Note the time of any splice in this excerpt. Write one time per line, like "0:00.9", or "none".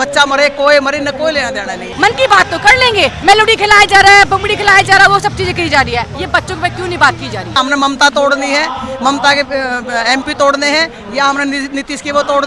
0:01.9
0:03.2
0:07.5